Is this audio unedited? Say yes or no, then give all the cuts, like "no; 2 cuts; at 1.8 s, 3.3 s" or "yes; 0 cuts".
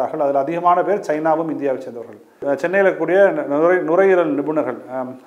no; 1 cut; at 2.4 s